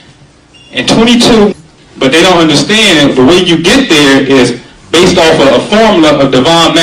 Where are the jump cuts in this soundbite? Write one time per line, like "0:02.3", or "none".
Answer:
none